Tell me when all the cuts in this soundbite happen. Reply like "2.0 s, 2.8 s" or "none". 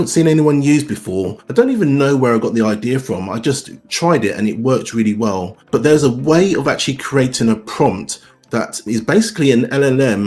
1.4 s, 5.5 s